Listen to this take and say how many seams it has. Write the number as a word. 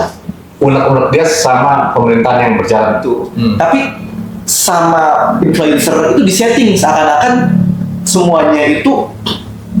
one